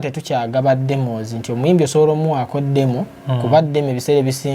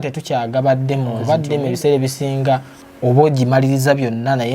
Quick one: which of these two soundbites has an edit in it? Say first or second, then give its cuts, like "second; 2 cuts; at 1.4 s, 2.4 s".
second; 1 cut; at 1.1 s